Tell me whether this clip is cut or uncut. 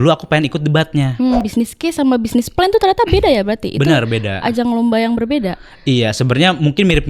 cut